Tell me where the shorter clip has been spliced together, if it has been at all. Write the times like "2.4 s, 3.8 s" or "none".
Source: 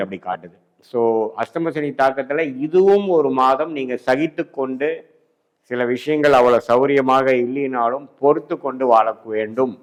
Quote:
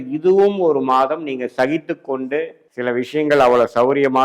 2.6 s